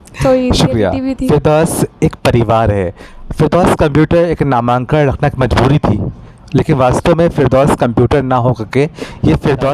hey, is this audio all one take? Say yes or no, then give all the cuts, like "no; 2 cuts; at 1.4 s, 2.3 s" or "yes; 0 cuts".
yes; 0 cuts